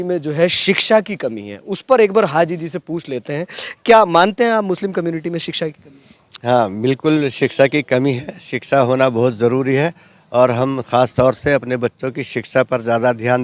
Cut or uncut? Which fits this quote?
uncut